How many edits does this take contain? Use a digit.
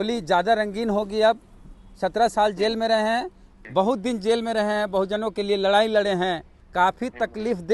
0